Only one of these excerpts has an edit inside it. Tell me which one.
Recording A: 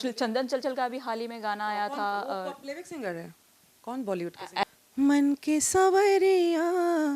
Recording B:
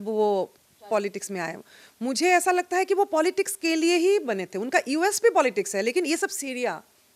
A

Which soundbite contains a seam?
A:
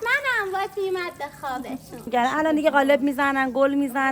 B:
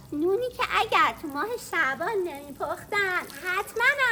A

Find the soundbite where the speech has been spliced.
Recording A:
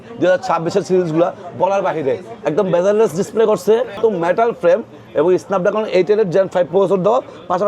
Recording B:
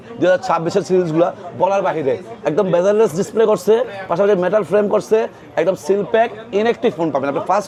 A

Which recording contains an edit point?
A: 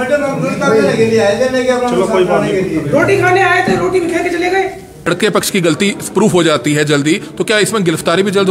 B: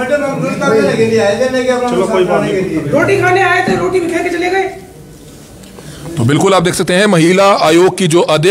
A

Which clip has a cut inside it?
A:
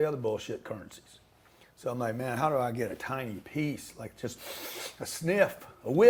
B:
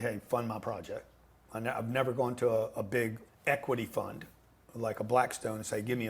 B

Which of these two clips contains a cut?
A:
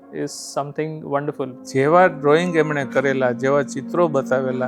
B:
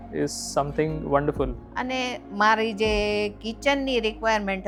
A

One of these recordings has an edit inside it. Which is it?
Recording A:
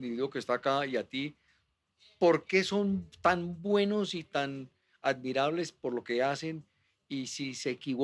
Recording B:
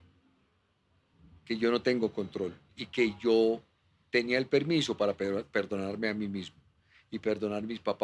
B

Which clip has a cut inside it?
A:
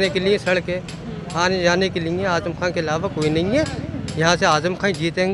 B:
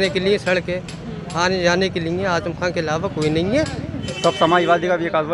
B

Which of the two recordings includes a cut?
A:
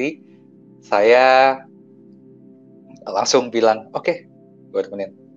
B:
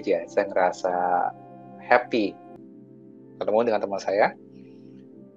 B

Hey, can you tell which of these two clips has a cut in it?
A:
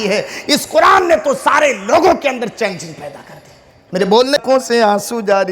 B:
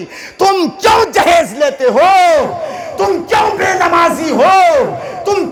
A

